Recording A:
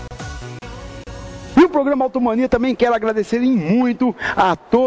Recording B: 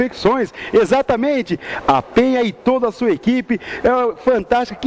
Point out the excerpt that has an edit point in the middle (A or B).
A